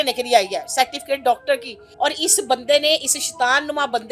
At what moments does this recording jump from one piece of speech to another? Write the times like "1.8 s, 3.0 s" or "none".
1.8 s